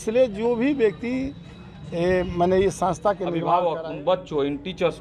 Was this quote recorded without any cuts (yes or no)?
no